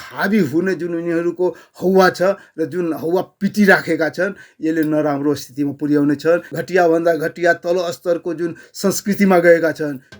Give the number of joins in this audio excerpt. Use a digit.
1